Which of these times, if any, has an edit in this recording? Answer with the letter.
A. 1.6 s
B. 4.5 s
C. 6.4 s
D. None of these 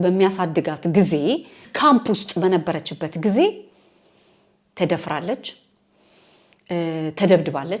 A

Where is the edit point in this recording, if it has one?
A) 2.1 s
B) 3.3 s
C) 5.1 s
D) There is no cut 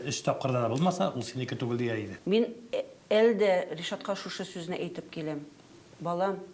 A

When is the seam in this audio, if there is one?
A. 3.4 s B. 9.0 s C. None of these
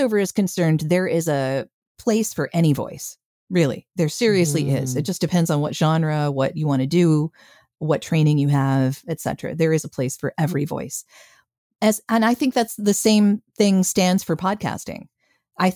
C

